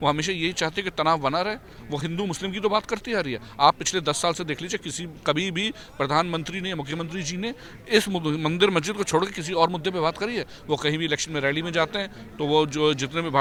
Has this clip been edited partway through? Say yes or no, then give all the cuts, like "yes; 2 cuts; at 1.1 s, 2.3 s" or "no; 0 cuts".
no; 0 cuts